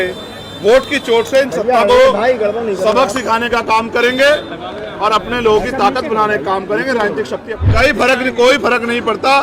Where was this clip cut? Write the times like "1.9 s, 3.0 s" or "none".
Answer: 7.5 s